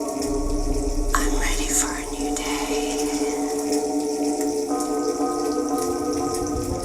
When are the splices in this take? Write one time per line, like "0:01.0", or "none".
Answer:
0:03.3